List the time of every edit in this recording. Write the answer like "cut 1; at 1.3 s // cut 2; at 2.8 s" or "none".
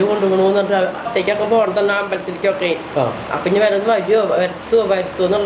cut 1; at 1.1 s